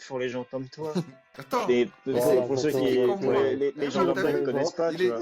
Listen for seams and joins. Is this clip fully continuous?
no; 1 cut; at 1.4 s

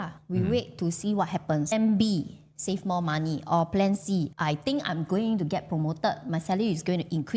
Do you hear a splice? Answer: no; 0 cuts

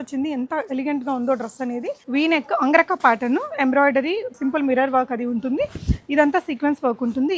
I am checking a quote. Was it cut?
yes; 2 cuts; at 2.0 s, 4.4 s

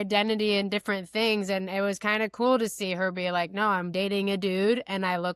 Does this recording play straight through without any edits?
yes; 0 cuts

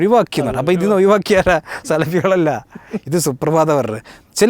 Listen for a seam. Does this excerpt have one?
no; 0 cuts

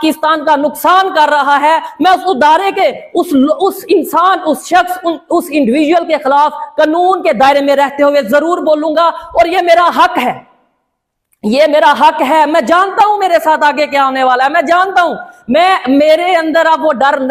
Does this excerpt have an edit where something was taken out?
no; 0 cuts

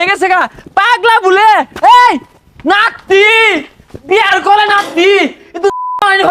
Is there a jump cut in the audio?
no; 0 cuts

